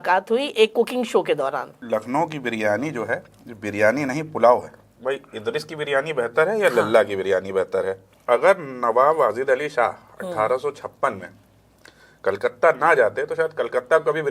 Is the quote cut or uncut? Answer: cut